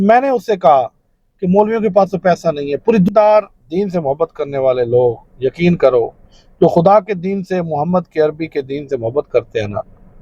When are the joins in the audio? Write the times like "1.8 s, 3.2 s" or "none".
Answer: 3.1 s